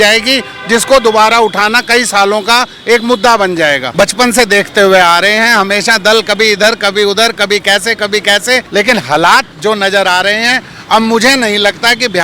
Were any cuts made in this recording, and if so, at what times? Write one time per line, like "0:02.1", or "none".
0:03.8
0:08.7